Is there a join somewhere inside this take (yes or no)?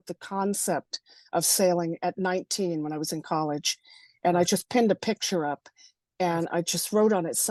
no